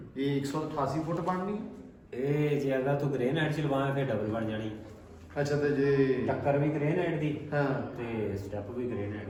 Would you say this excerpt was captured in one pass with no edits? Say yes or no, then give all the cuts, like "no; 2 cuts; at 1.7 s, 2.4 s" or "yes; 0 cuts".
yes; 0 cuts